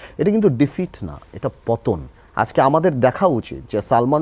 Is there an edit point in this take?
yes; 1 cut; at 2.2 s

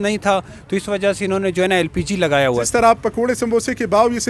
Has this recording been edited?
yes; 1 cut; at 2.7 s

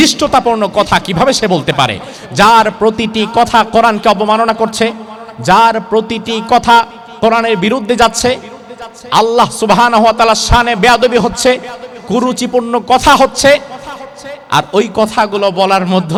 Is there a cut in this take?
no; 0 cuts

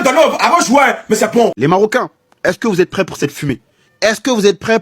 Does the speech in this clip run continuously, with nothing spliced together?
no; 1 cut; at 1.6 s

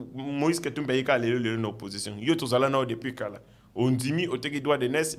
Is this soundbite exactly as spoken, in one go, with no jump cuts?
yes; 0 cuts

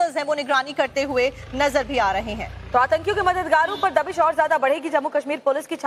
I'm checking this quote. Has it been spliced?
no; 0 cuts

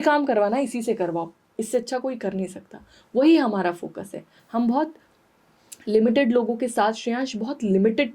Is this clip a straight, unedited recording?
yes; 0 cuts

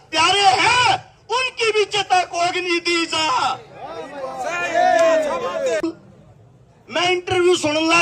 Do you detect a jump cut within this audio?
yes; 1 cut; at 5.8 s

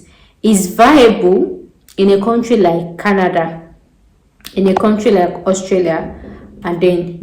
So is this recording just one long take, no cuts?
yes; 0 cuts

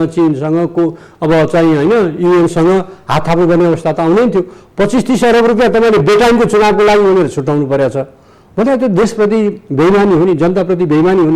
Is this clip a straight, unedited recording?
yes; 0 cuts

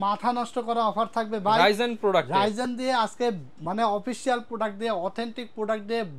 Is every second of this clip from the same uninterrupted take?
yes; 0 cuts

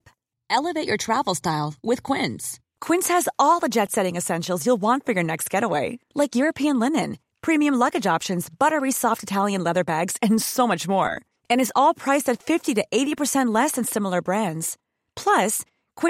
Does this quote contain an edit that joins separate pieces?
no; 0 cuts

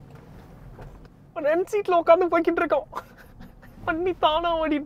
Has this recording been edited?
no; 0 cuts

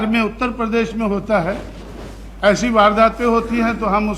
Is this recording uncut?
yes; 0 cuts

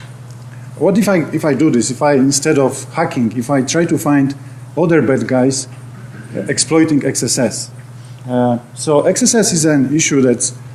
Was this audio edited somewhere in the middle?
yes; 1 cut; at 7.4 s

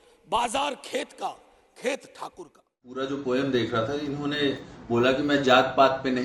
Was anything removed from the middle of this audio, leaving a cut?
yes; 1 cut; at 3.0 s

